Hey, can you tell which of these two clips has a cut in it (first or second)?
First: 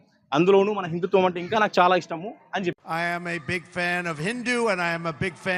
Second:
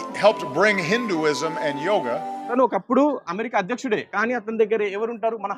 second